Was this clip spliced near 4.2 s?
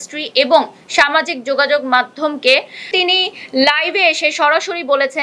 no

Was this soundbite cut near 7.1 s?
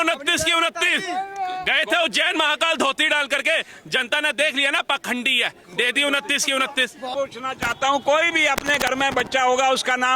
yes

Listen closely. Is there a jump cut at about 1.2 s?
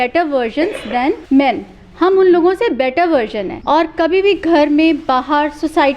yes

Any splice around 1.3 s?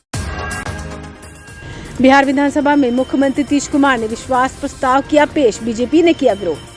yes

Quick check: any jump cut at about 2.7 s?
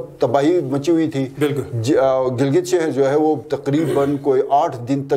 no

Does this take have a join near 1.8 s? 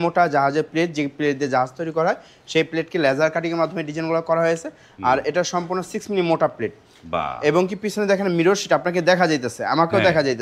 no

